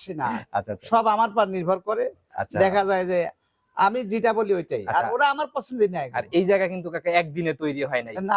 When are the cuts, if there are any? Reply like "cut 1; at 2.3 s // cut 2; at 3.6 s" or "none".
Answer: none